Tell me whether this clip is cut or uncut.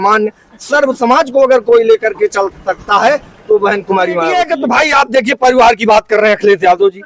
cut